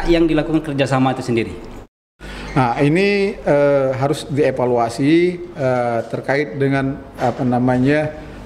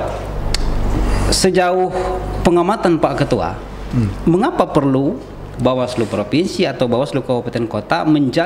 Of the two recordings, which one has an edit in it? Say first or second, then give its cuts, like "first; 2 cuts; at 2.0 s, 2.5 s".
first; 1 cut; at 1.9 s